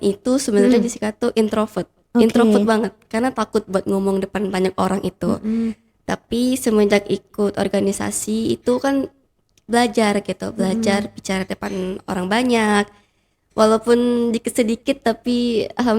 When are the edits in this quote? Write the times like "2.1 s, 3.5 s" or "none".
none